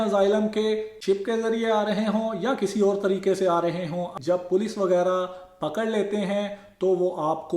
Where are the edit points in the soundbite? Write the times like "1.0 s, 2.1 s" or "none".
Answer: 1.0 s, 4.1 s